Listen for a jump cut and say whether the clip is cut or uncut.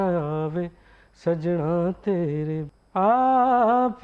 cut